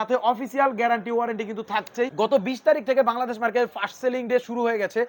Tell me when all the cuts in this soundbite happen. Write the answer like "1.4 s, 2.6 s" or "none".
2.1 s